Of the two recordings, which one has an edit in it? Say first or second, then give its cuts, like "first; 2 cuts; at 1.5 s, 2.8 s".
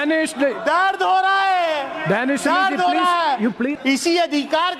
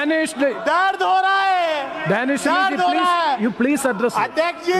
first; 1 cut; at 3.8 s